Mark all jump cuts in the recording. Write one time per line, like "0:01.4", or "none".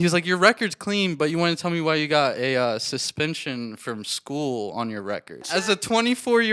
0:05.4